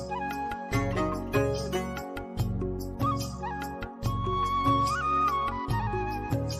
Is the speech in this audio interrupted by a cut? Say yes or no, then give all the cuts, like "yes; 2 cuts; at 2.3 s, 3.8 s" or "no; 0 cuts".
no; 0 cuts